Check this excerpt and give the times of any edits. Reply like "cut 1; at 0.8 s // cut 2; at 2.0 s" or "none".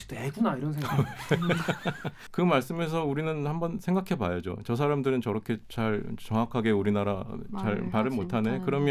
cut 1; at 2.1 s